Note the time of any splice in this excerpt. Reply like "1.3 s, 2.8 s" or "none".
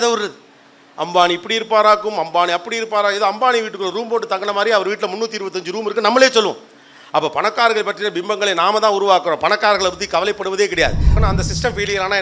11.1 s

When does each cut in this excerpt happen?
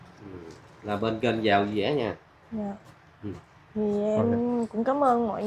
none

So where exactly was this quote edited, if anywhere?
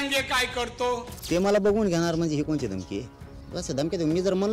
1.1 s

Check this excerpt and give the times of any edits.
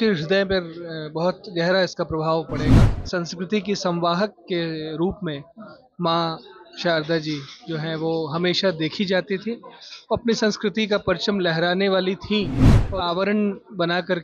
2.9 s, 12.9 s

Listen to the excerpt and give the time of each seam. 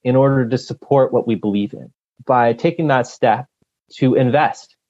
1.8 s, 3.6 s

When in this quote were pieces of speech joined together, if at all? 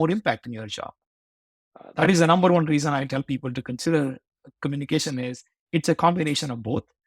none

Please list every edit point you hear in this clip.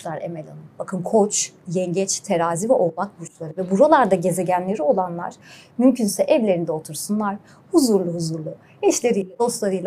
none

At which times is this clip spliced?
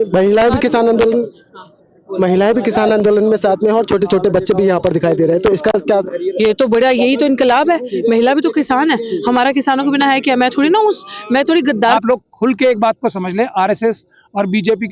12.0 s

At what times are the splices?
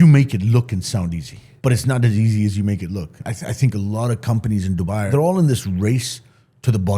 1.4 s, 3.2 s, 5.1 s

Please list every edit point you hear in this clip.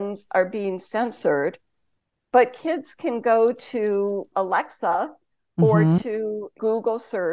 4.3 s, 6.6 s

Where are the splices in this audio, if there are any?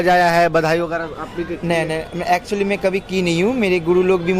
none

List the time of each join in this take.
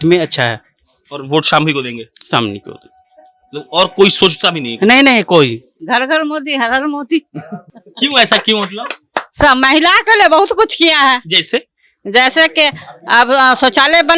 5.7 s

